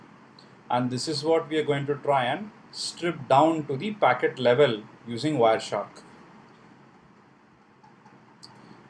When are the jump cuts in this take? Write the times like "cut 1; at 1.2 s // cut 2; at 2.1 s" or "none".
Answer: none